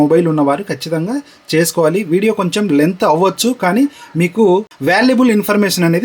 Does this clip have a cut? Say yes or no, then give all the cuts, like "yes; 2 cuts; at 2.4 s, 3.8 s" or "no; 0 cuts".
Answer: no; 0 cuts